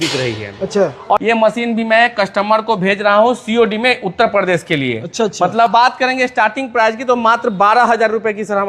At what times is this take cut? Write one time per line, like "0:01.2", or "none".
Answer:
0:01.2
0:05.7